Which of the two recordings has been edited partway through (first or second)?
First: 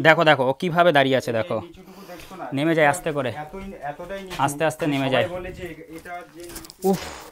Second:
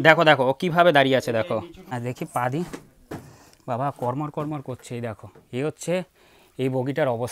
second